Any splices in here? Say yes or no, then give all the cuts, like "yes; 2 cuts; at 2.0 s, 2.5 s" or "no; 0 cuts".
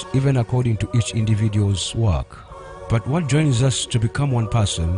no; 0 cuts